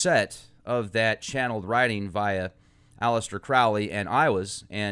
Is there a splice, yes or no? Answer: no